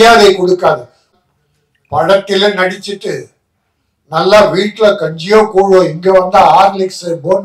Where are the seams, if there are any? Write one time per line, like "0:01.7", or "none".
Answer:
0:01.1